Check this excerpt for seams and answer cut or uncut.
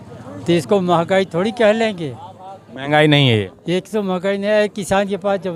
uncut